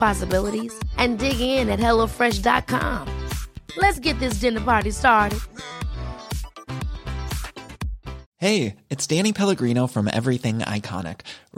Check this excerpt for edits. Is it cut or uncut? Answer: cut